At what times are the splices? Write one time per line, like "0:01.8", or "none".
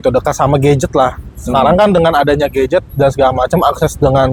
none